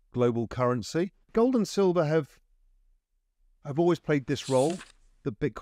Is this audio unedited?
no; 1 cut; at 1.2 s

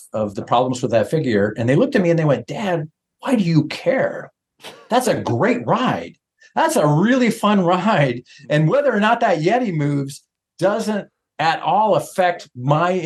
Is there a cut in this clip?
no; 0 cuts

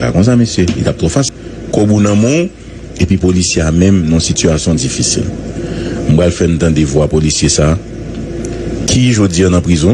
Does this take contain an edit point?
yes; 1 cut; at 1.3 s

